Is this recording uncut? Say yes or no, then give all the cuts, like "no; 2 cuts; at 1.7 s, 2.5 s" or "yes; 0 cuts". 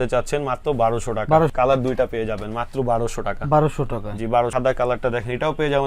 no; 2 cuts; at 1.5 s, 4.5 s